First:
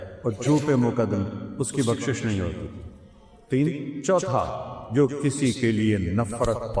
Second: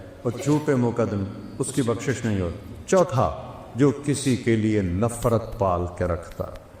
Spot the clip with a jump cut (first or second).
second